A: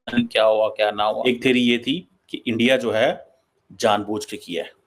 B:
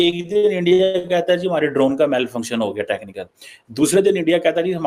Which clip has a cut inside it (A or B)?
A